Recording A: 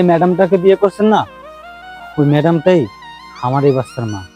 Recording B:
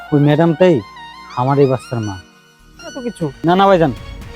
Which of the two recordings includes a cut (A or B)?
B